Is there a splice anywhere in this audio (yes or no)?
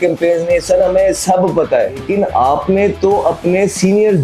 yes